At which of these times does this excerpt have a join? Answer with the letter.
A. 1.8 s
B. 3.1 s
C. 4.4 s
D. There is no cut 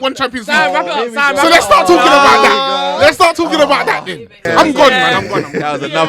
C